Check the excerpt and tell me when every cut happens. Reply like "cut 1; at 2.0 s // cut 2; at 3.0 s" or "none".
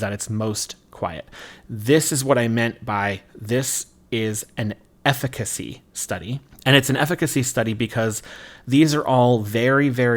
none